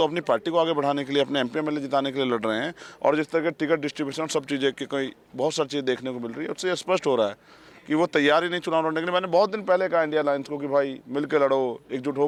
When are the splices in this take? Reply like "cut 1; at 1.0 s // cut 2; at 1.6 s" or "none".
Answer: none